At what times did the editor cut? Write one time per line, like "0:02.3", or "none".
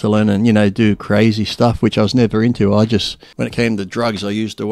0:03.2